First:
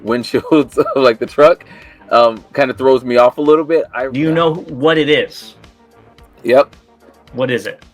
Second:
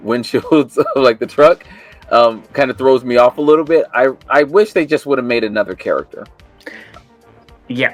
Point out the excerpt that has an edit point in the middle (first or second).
first